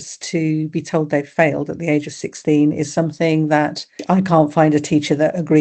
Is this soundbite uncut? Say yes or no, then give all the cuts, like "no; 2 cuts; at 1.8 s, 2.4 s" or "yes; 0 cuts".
no; 1 cut; at 3.9 s